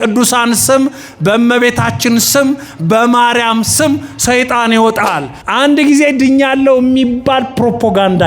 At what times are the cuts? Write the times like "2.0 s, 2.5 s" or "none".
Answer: 5.3 s